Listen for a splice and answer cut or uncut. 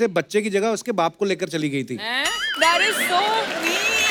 uncut